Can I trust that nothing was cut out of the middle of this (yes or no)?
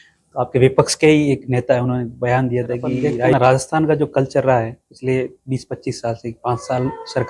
no